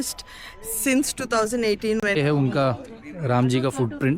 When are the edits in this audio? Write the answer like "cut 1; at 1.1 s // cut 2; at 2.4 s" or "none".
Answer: cut 1; at 2.1 s